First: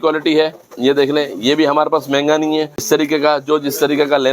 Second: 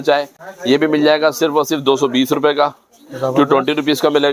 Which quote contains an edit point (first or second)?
first